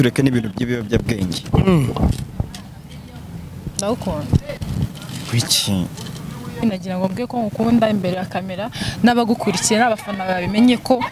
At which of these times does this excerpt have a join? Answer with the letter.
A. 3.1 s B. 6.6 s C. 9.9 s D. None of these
B